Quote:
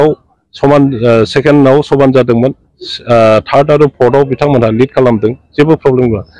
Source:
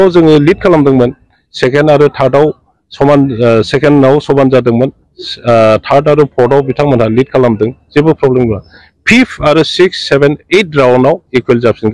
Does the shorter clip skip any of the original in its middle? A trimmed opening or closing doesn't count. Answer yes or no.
no